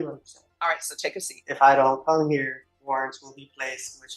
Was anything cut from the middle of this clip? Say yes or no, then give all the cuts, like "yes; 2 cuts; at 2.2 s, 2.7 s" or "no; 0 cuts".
yes; 2 cuts; at 1.4 s, 2.7 s